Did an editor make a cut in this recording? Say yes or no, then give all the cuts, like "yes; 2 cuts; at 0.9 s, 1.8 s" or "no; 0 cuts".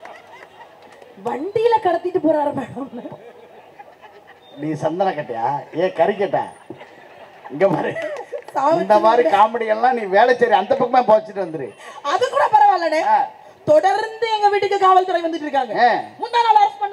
no; 0 cuts